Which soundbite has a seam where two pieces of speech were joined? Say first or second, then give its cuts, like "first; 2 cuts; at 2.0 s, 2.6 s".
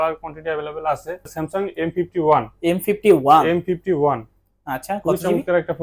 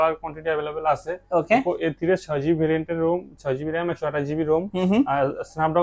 first; 1 cut; at 1.3 s